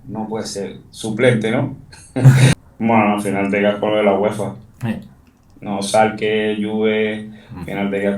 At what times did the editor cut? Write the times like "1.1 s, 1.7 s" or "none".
2.5 s